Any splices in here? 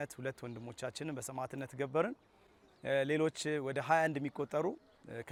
no; 0 cuts

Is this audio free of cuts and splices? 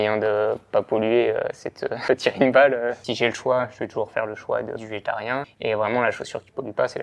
no; 3 cuts; at 1.9 s, 3.0 s, 5.3 s

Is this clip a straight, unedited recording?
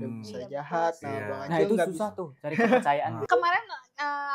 no; 1 cut; at 3.1 s

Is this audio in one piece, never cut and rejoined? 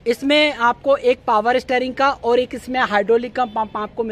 yes; 0 cuts

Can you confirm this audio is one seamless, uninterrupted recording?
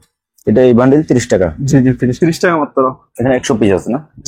no; 1 cut; at 2.1 s

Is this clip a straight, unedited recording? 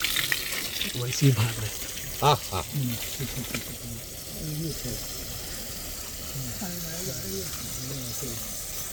yes; 0 cuts

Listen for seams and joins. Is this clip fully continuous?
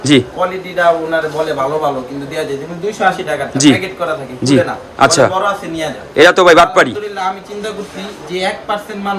yes; 0 cuts

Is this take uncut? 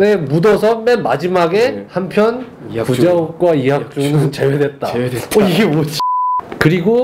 no; 1 cut; at 6.0 s

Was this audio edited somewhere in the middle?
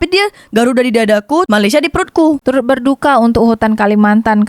yes; 1 cut; at 2.4 s

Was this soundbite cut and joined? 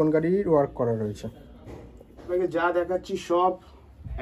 yes; 1 cut; at 2.3 s

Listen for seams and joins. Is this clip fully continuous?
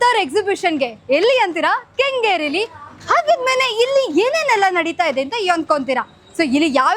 yes; 0 cuts

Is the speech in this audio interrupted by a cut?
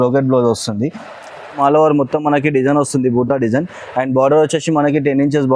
yes; 1 cut; at 1.4 s

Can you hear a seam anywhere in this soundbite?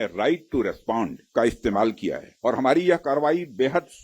yes; 2 cuts; at 1.2 s, 2.3 s

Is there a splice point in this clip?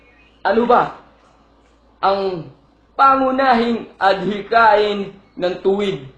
yes; 1 cut; at 2.2 s

